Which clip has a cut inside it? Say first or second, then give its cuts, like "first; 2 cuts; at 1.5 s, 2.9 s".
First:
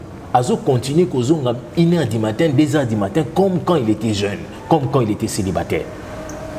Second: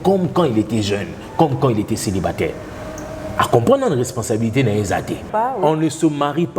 second; 1 cut; at 5.3 s